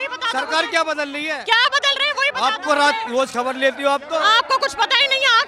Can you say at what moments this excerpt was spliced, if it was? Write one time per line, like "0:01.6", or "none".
none